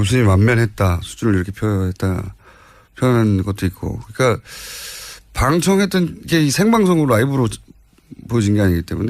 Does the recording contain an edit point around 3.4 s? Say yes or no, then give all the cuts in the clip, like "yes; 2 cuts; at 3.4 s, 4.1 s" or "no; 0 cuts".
no; 1 cut; at 5.8 s